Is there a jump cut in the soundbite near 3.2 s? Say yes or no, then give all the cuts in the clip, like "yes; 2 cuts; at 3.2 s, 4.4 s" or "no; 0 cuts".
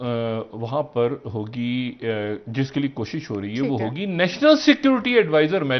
no; 0 cuts